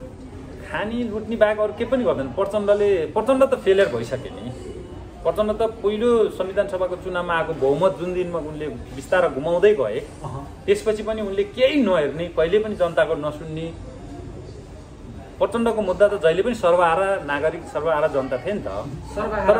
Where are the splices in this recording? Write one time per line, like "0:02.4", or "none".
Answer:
none